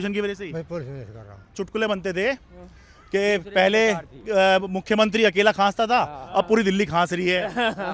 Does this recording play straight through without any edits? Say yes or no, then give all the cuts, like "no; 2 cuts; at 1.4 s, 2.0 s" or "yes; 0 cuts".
no; 1 cut; at 1.5 s